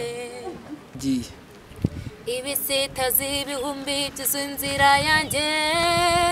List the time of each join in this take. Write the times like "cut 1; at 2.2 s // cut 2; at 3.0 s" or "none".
cut 1; at 1.0 s